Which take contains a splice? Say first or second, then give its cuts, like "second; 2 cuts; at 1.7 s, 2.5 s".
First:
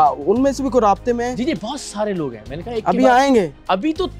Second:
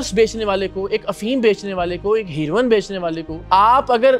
second; 1 cut; at 3.3 s